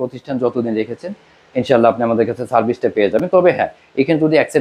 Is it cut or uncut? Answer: uncut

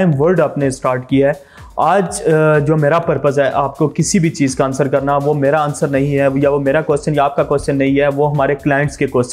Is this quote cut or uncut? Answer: uncut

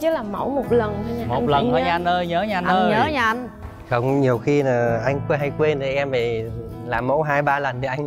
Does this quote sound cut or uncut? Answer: uncut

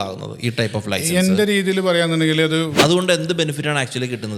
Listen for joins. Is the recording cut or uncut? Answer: cut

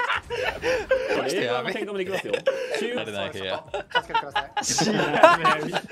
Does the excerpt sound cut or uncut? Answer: cut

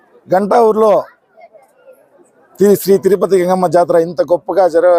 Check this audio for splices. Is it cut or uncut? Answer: uncut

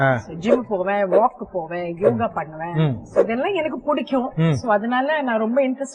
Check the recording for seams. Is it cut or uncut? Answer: uncut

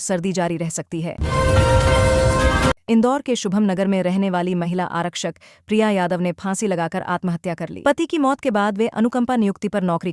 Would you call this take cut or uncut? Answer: cut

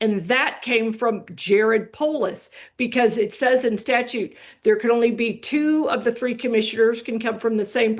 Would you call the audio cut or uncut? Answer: uncut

